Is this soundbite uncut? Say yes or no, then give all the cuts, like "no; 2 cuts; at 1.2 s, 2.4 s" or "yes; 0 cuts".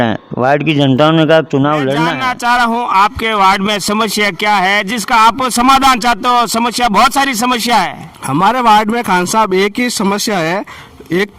no; 1 cut; at 2.1 s